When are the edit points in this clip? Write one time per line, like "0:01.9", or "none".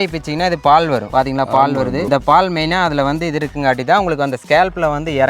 0:02.1